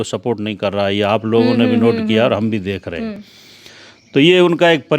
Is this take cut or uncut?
uncut